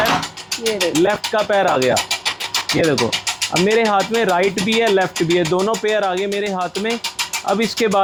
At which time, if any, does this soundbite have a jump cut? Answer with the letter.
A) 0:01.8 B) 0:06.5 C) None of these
C